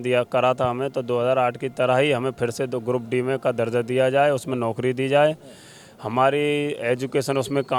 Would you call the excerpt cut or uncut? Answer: uncut